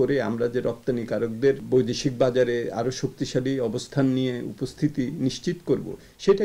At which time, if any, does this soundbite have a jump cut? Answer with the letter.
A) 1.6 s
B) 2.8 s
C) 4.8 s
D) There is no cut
A